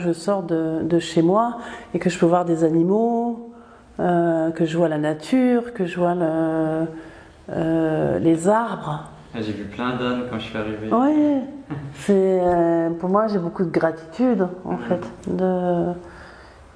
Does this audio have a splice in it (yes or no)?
no